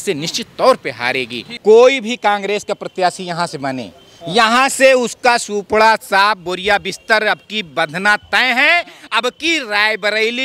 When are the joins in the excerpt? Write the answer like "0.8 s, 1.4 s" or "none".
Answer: 1.5 s